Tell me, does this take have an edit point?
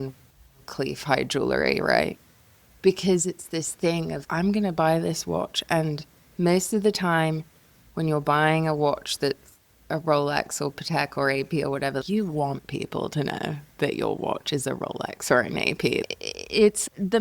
yes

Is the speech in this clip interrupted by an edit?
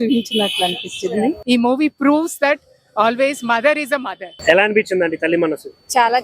yes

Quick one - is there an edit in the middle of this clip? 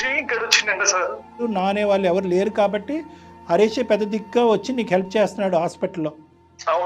yes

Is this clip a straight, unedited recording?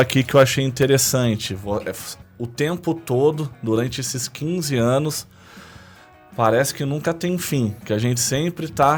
yes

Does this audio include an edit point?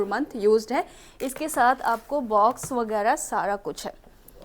no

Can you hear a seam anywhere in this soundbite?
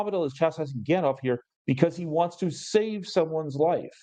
no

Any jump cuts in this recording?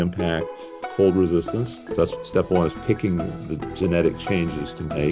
yes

